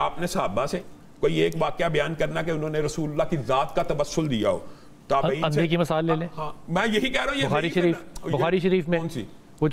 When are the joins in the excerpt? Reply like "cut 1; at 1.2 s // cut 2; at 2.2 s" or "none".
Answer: none